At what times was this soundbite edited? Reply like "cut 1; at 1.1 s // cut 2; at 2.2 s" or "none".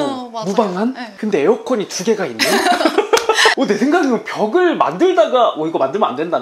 none